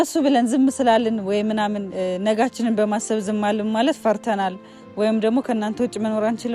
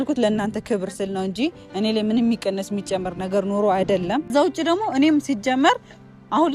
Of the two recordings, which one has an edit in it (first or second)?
second